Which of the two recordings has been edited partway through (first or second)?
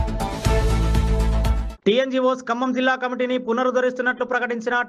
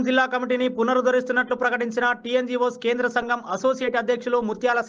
first